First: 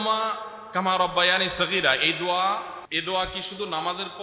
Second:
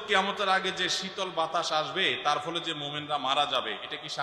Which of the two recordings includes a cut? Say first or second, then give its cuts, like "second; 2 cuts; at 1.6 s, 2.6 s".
first; 1 cut; at 2.8 s